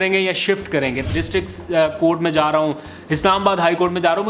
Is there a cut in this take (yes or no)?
yes